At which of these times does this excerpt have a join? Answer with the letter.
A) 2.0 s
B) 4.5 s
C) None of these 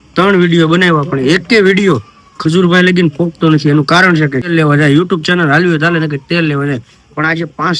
B